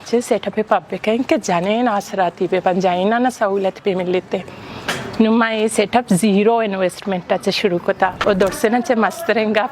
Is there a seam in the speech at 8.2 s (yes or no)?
yes